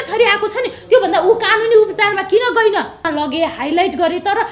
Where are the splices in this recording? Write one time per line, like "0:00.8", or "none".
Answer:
0:03.1